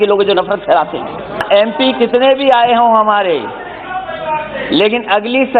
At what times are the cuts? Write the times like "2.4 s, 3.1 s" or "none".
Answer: 1.4 s